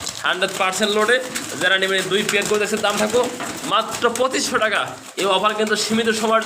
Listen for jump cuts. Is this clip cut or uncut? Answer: uncut